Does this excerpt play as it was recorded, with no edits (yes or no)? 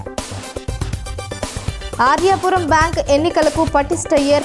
no